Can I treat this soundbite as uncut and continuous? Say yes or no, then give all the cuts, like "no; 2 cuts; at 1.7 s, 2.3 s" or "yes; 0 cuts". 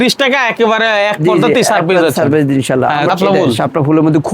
no; 1 cut; at 3.1 s